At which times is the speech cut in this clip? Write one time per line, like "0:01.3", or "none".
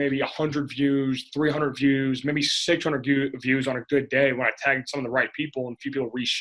none